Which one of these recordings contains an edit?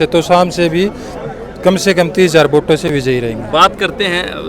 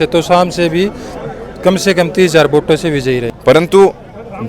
second; 1 cut; at 2.9 s

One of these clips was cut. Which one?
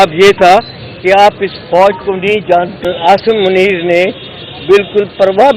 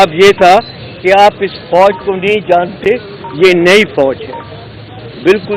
first; 1 cut; at 2.8 s

